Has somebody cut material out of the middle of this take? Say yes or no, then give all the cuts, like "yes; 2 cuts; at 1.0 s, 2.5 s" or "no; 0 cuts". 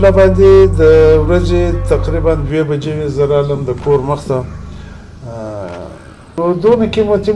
yes; 1 cut; at 6.2 s